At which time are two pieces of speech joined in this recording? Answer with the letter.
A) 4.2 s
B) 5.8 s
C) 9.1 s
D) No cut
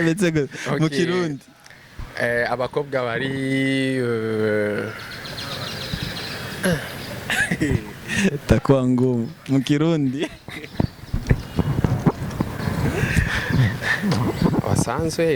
D